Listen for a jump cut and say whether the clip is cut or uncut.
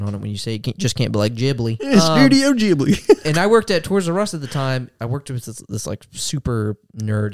cut